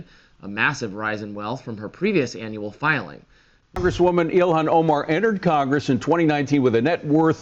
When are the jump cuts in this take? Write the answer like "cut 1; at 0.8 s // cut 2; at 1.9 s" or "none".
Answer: cut 1; at 3.8 s

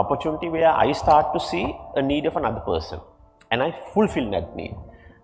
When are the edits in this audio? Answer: none

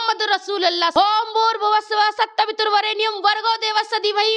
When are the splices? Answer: cut 1; at 0.9 s

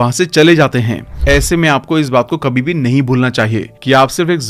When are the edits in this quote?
cut 1; at 1.1 s

